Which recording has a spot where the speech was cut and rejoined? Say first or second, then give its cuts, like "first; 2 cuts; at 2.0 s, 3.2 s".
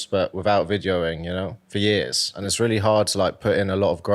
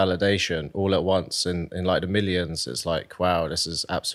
first; 2 cuts; at 1.6 s, 2.3 s